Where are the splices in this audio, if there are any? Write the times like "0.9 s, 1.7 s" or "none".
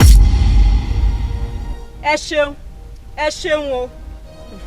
1.5 s